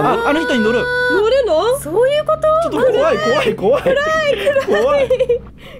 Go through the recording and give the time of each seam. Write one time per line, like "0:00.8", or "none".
none